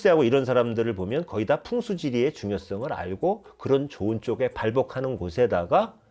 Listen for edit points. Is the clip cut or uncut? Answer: uncut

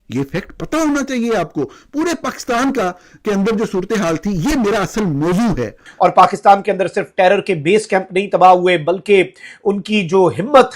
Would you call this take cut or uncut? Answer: cut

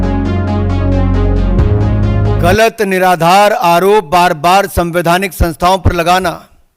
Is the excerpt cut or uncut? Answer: cut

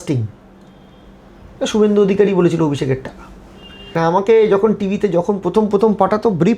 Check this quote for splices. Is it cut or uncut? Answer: cut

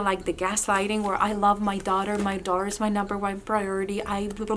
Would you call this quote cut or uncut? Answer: uncut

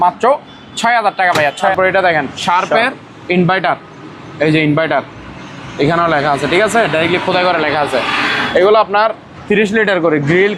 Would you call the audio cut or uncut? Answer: cut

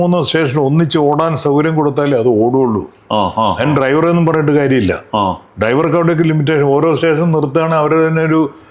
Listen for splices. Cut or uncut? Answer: uncut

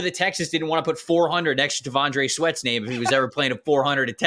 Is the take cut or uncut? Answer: uncut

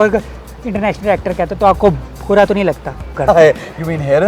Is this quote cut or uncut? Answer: cut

